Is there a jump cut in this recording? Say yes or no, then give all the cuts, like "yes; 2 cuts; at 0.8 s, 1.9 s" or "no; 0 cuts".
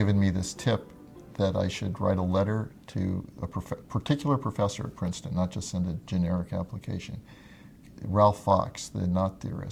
no; 0 cuts